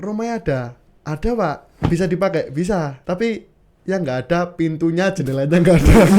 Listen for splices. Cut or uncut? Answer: cut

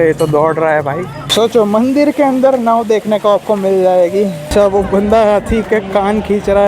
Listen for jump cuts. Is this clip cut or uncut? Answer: cut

